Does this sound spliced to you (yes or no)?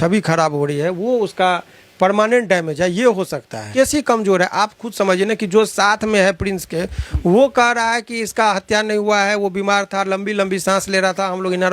yes